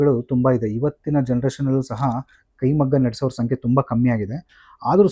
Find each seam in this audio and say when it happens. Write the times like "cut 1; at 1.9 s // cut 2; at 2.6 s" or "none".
none

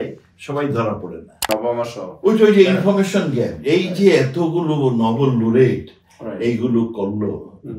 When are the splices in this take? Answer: cut 1; at 1.5 s

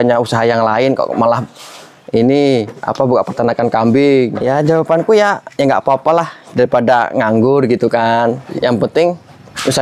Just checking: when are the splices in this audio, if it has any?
cut 1; at 4.5 s // cut 2; at 8.5 s

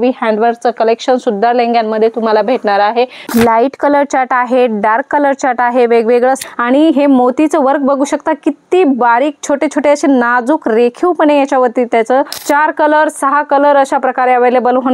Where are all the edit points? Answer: cut 1; at 3.3 s // cut 2; at 6.5 s // cut 3; at 12.4 s

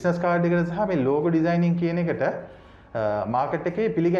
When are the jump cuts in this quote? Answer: none

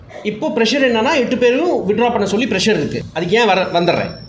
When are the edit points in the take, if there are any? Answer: none

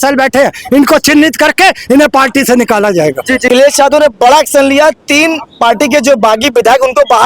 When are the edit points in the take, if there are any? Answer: cut 1; at 3.5 s

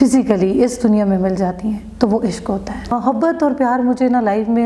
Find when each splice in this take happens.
cut 1; at 2.9 s

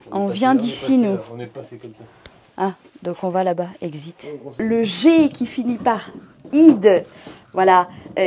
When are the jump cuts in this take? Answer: cut 1; at 4.6 s

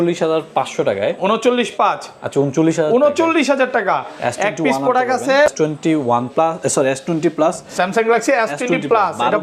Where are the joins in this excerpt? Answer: cut 1; at 5.5 s

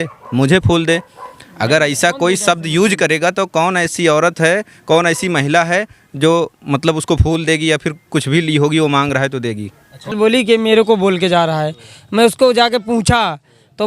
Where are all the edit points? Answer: cut 1; at 10.1 s

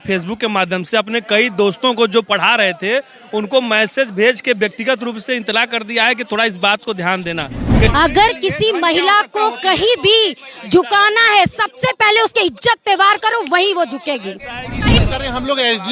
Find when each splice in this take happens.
cut 1; at 7.9 s // cut 2; at 15.0 s

